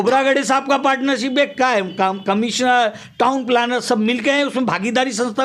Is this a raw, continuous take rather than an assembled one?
yes; 0 cuts

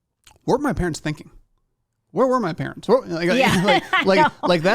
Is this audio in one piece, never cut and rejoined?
yes; 0 cuts

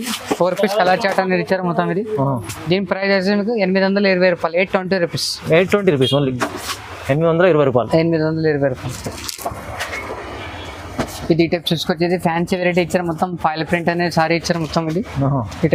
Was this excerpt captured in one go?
yes; 0 cuts

